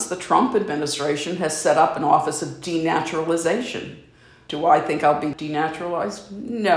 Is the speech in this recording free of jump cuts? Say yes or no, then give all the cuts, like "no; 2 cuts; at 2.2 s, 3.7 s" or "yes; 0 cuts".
no; 2 cuts; at 4.4 s, 5.3 s